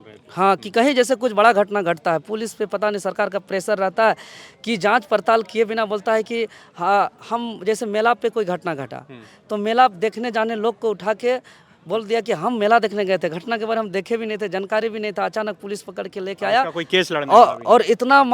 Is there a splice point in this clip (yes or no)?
no